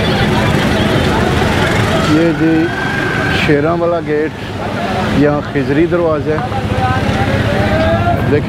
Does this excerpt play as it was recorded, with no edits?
yes; 0 cuts

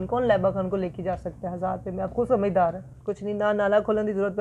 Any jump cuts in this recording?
yes; 1 cut; at 2.9 s

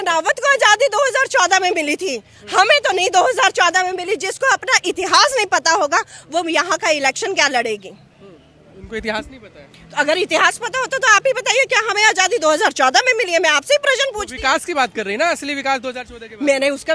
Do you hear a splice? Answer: no; 0 cuts

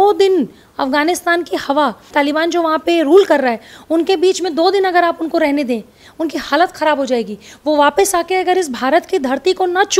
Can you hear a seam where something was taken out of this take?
yes; 1 cut; at 2.1 s

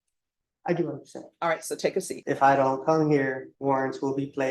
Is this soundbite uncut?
no; 2 cuts; at 2.2 s, 3.5 s

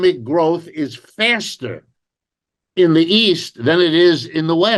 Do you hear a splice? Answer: no; 0 cuts

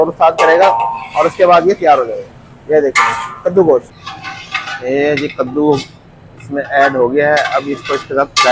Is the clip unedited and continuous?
no; 1 cut; at 3.9 s

